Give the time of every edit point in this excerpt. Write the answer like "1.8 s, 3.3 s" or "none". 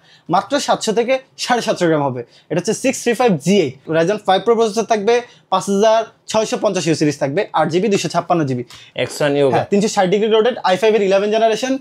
8.8 s

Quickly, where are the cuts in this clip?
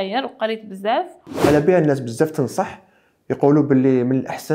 1.3 s

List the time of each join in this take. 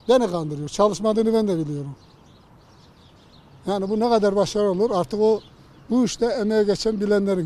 none

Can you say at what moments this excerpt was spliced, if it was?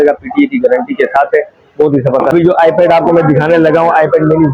2.3 s

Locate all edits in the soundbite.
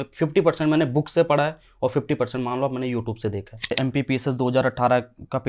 3.7 s

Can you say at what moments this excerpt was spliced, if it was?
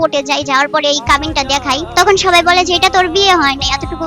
1.9 s

